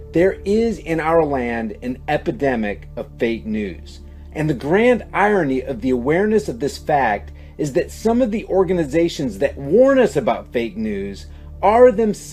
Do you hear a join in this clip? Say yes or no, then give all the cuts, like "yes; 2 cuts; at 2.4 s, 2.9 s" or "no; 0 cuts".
yes; 1 cut; at 1.9 s